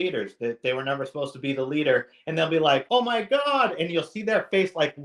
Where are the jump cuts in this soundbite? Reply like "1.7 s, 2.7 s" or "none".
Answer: 2.8 s